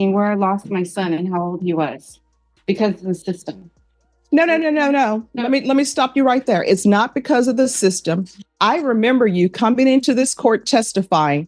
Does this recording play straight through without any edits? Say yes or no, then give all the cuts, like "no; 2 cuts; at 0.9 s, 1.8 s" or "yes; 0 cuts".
yes; 0 cuts